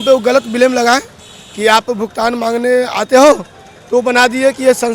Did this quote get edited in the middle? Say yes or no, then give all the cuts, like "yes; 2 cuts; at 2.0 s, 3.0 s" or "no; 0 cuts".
no; 0 cuts